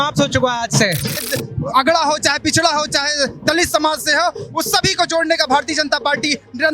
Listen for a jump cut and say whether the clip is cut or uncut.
cut